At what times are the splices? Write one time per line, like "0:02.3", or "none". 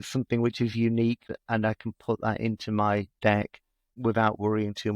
0:01.3
0:03.3

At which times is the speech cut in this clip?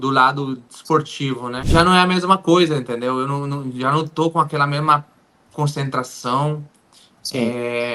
0:01.5

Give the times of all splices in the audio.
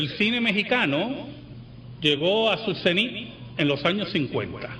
0:01.3

